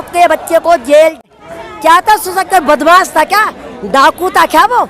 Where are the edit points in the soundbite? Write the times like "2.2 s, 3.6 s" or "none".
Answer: 1.2 s

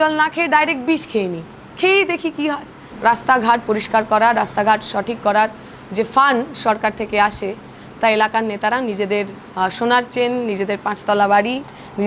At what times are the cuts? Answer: 2.9 s

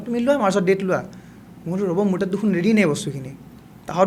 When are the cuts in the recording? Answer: none

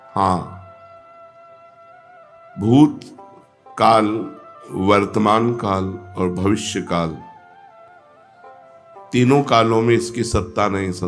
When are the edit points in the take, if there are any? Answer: 7.2 s, 9.1 s

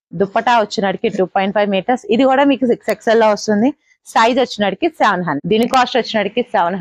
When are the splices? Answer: 5.4 s

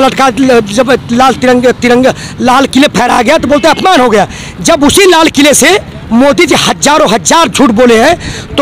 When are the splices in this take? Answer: none

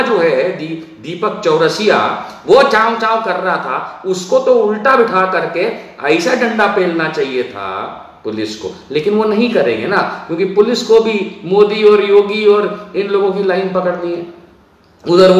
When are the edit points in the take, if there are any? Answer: none

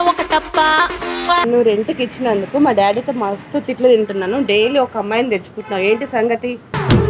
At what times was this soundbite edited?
1.5 s

